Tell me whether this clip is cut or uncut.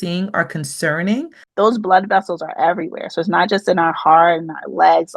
cut